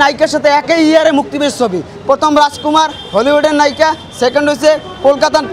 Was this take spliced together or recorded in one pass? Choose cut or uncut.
uncut